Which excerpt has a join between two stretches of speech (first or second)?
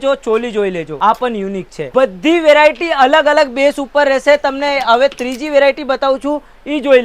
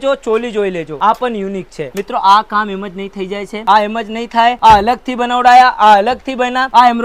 second